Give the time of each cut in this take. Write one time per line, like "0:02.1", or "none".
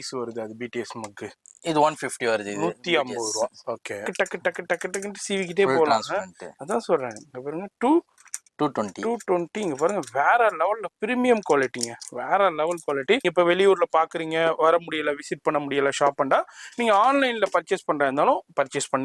0:04.1
0:13.3